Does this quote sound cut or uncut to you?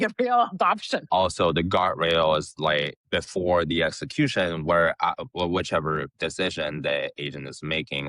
cut